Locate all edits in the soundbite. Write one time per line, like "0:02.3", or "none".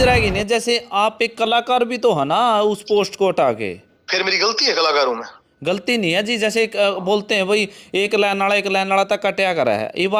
none

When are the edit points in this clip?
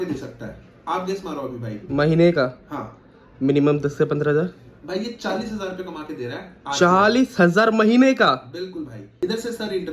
0:09.0

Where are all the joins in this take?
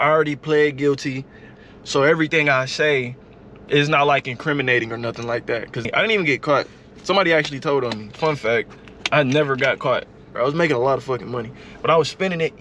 0:01.5
0:05.9
0:10.3

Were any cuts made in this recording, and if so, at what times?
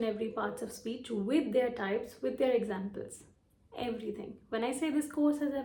none

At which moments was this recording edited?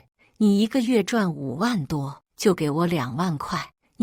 none

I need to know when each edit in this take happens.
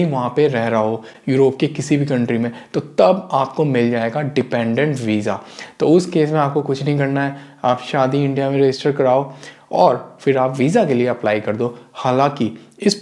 none

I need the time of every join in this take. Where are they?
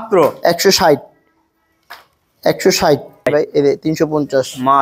0:03.3

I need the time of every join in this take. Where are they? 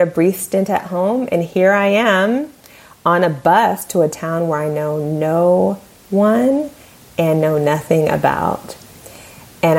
0:03.8

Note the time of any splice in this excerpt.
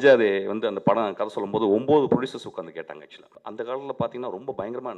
0:03.3

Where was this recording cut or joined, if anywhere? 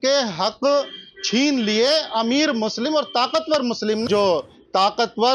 0:04.0

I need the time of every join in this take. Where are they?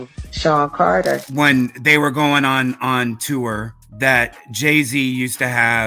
0:01.3

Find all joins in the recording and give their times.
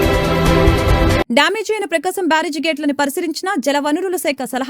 0:01.2

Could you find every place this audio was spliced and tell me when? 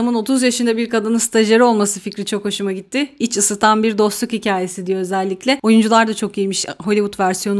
none

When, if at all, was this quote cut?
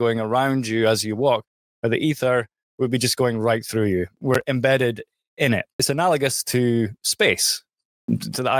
0:04.2
0:05.7

